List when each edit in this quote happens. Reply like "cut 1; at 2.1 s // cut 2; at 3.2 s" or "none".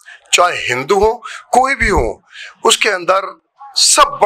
none